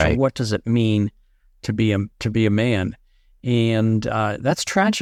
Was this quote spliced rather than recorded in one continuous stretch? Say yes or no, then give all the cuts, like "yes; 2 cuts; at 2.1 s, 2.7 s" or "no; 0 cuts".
no; 0 cuts